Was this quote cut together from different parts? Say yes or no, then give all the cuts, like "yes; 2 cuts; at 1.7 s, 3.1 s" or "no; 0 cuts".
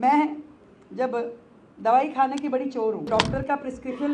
yes; 1 cut; at 3.1 s